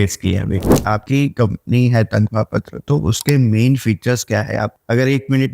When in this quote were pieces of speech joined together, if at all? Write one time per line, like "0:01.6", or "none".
0:00.9